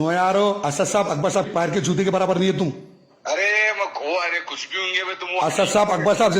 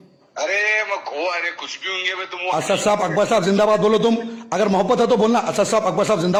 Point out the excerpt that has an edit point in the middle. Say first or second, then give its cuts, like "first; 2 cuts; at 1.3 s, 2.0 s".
first; 1 cut; at 1.5 s